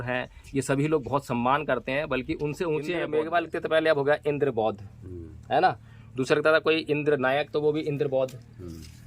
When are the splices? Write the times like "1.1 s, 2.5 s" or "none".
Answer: 3.1 s